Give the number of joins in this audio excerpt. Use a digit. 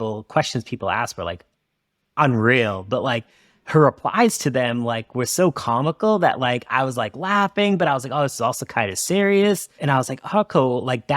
1